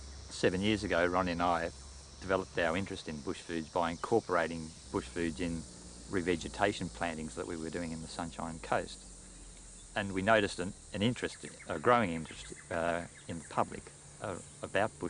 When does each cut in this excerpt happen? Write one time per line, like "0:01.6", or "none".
none

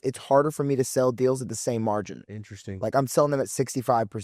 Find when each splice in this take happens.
none

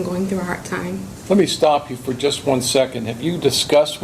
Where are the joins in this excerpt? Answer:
0:01.1

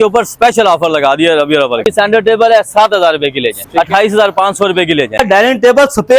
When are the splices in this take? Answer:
0:01.8
0:03.6
0:05.2

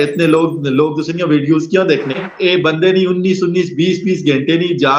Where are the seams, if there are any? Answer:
0:02.3

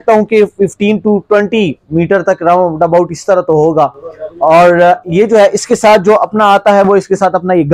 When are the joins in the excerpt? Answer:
none

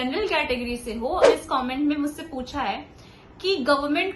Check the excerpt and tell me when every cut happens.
0:01.3

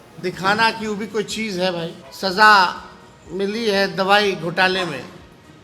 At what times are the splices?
0:02.0

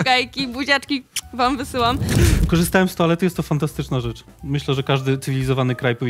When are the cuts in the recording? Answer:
0:02.1

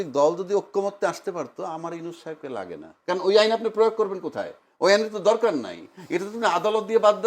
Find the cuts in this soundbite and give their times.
0:02.9

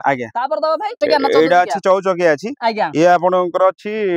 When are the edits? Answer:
0:01.0

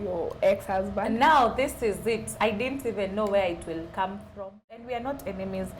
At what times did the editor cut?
0:04.9

